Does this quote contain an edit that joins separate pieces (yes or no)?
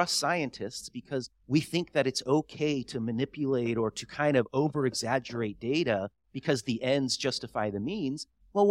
yes